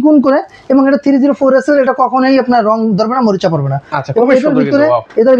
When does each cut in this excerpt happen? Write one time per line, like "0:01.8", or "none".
none